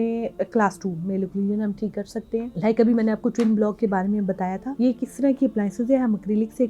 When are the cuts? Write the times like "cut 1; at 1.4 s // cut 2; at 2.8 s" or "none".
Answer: cut 1; at 2.5 s // cut 2; at 4.6 s